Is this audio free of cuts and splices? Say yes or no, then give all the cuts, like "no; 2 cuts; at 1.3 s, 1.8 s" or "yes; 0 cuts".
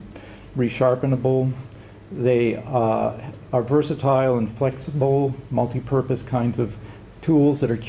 no; 1 cut; at 6.2 s